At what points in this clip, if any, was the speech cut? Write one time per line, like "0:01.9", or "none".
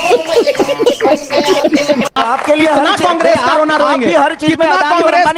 0:02.2